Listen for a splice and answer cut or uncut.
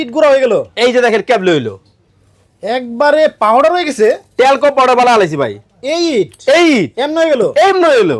uncut